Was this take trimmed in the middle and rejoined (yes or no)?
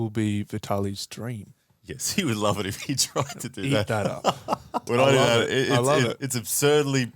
yes